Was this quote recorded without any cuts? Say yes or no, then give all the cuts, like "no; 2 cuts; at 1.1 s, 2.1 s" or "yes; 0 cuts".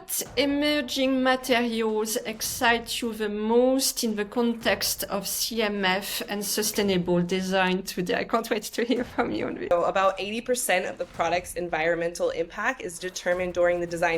no; 1 cut; at 9.7 s